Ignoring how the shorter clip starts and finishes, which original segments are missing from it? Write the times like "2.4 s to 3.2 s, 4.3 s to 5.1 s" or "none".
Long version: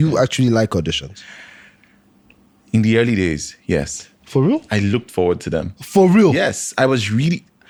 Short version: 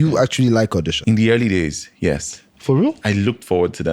0.9 s to 2.6 s